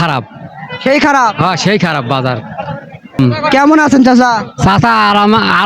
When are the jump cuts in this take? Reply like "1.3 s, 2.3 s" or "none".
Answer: 3.1 s